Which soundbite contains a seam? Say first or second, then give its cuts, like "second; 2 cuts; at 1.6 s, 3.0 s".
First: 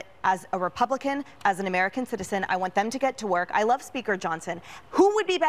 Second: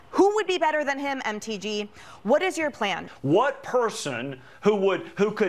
second; 1 cut; at 3.0 s